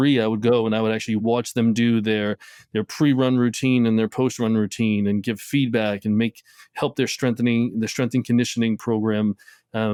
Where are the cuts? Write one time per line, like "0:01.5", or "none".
none